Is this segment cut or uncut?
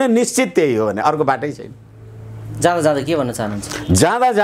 uncut